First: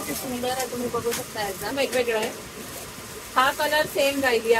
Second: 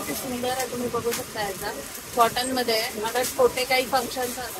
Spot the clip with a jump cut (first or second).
first